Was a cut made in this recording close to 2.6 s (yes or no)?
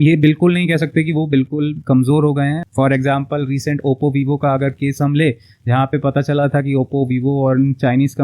yes